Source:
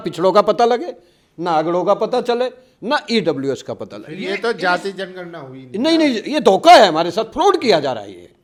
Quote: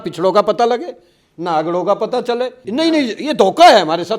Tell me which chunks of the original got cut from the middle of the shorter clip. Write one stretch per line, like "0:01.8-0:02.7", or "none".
0:02.6-0:05.7